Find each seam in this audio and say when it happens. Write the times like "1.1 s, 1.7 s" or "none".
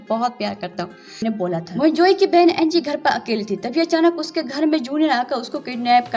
1.2 s